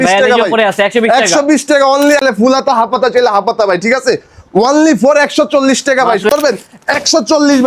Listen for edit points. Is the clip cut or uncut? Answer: cut